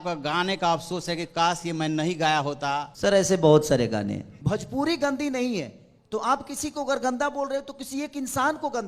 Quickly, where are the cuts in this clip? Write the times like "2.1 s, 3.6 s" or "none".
2.9 s, 4.3 s

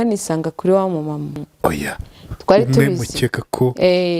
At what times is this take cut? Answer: 1.5 s

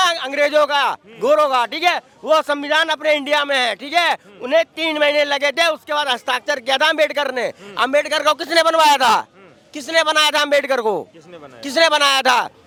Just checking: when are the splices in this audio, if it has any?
none

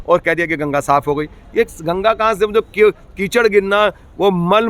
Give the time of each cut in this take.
none

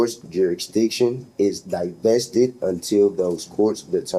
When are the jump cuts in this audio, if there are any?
none

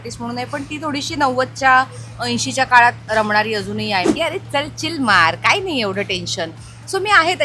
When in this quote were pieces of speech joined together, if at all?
4.1 s

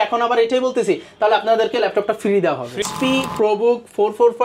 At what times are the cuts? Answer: 2.8 s

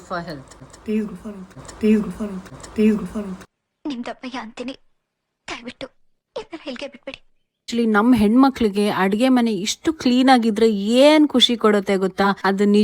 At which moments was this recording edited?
7.7 s

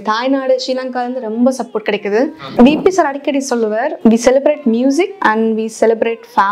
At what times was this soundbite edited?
2.4 s, 3.9 s, 5.1 s

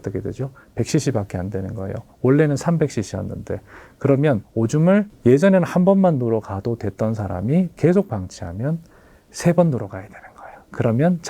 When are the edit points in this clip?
7.8 s

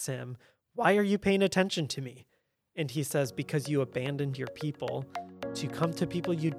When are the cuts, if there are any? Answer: 5.4 s

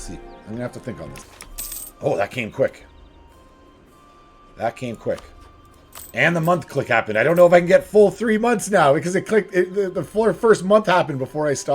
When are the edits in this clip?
1.2 s

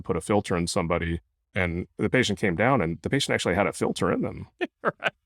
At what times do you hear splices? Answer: 1.4 s

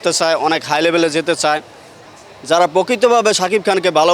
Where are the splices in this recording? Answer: 2.0 s

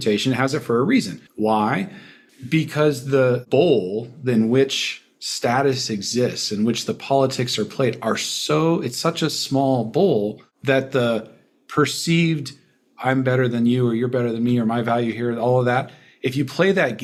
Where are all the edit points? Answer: none

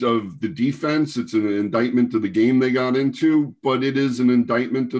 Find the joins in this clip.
none

